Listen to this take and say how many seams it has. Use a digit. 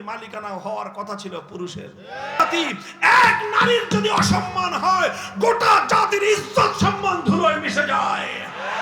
1